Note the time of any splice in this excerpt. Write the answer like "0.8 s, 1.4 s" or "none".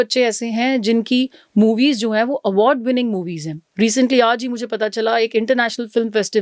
none